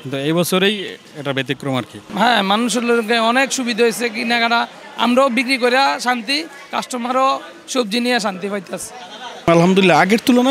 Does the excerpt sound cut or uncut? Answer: cut